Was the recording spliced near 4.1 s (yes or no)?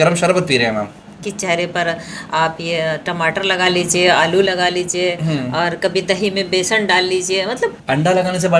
no